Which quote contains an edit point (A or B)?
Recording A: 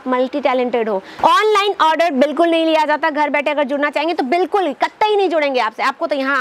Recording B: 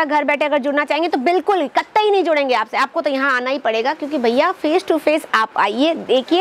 A